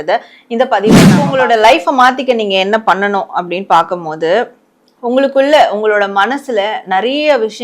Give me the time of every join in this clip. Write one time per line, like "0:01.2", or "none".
0:01.2